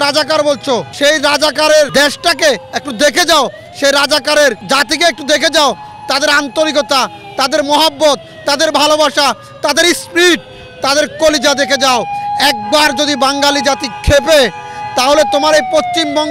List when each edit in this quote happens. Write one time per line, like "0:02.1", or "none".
0:00.9
0:01.9
0:04.6